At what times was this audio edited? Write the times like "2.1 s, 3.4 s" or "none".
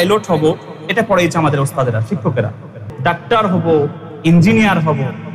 2.8 s